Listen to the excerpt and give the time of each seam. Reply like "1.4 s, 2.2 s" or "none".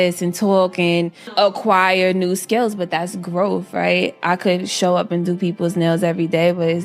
1.3 s

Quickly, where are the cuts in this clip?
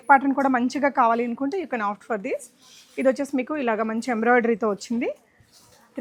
none

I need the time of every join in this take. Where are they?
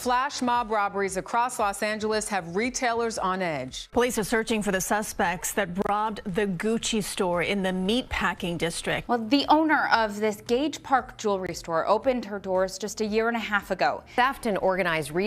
3.8 s, 9.0 s, 14.0 s

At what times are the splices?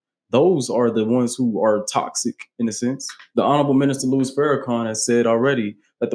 3.4 s

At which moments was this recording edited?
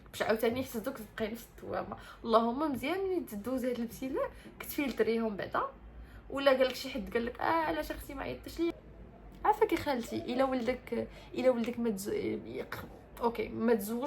8.7 s

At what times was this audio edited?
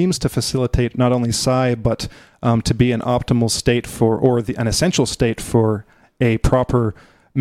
none

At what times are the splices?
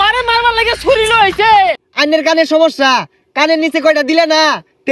1.8 s

